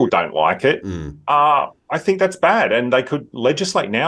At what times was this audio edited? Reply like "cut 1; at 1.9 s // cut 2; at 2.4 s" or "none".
none

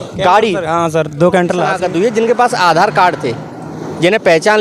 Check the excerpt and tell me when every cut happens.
cut 1; at 1.7 s

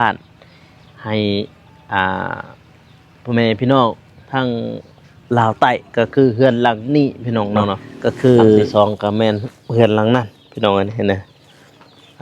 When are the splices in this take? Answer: cut 1; at 8.7 s

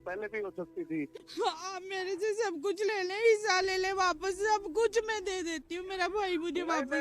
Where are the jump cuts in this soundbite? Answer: cut 1; at 1.2 s

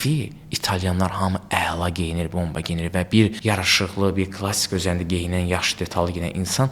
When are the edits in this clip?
cut 1; at 3.4 s

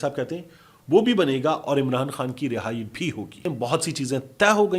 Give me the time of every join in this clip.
cut 1; at 3.5 s

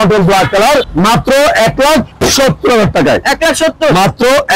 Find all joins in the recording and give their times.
none

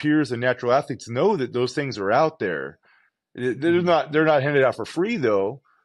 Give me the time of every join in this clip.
none

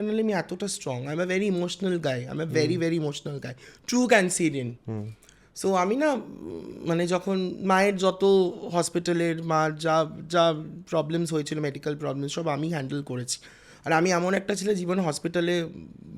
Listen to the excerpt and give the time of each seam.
none

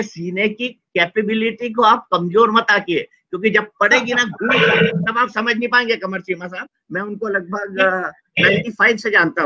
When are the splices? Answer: none

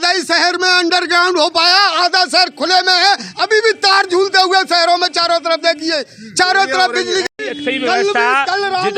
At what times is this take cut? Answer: none

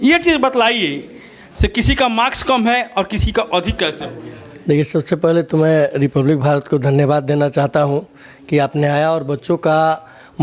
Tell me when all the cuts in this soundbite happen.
none

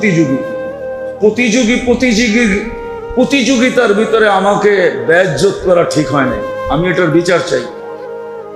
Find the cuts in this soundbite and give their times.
cut 1; at 7.7 s

